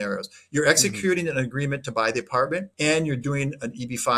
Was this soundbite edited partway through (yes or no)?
yes